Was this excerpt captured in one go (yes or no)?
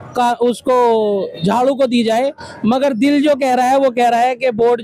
yes